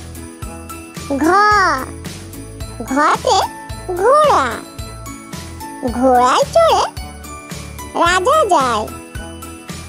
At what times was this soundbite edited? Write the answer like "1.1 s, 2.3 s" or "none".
8.9 s